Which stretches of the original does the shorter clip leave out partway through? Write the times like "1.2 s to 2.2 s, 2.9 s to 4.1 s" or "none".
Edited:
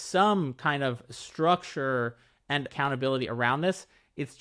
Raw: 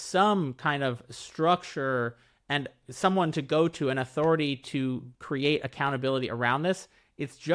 2.7 s to 5.7 s